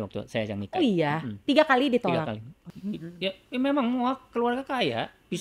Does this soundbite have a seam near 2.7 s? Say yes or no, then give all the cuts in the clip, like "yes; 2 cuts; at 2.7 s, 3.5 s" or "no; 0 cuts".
yes; 1 cut; at 2.7 s